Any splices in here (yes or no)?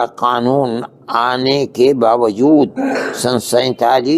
yes